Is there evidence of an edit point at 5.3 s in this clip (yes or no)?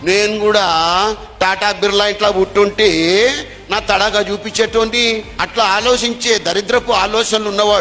yes